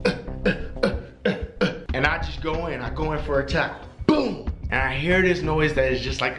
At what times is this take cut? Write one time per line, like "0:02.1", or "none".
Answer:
0:01.8
0:04.5